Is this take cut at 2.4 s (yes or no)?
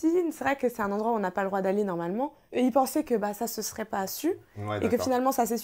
yes